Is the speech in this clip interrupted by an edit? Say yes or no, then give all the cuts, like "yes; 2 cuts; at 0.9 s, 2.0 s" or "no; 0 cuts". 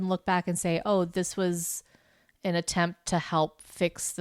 no; 0 cuts